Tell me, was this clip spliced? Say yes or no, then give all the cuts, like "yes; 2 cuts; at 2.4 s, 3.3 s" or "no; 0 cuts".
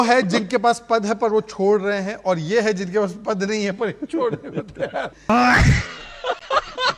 yes; 1 cut; at 5.1 s